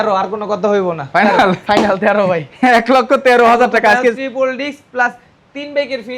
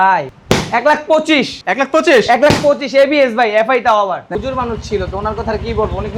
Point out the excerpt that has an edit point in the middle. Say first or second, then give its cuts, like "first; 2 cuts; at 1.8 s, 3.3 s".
second; 1 cut; at 4.3 s